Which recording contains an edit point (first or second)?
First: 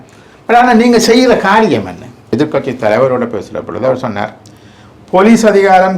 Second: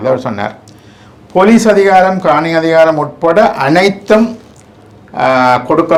first